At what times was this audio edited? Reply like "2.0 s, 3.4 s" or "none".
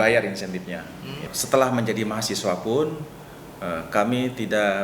1.2 s